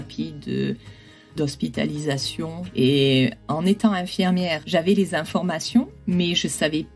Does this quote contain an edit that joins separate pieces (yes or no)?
yes